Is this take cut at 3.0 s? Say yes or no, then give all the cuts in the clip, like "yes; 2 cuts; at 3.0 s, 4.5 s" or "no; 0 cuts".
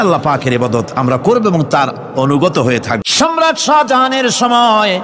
yes; 1 cut; at 3.0 s